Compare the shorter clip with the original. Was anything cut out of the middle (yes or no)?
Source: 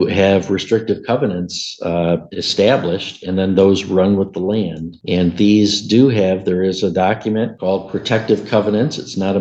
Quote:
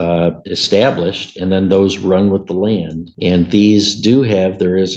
no